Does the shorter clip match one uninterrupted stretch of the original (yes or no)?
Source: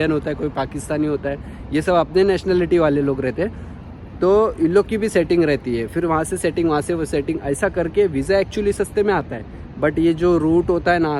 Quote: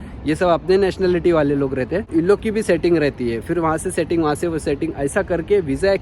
no